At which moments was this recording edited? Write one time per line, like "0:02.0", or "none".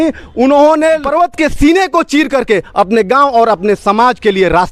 0:01.1